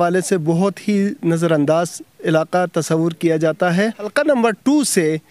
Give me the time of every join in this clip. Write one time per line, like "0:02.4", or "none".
0:04.0